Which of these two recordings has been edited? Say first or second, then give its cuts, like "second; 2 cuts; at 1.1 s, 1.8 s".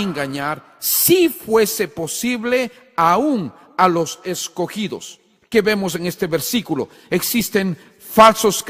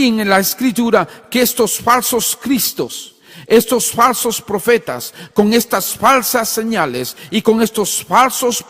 second; 1 cut; at 5.9 s